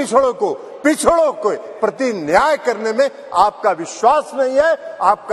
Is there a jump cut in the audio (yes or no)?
no